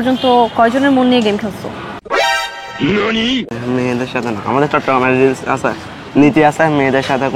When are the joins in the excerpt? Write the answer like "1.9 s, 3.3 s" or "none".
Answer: none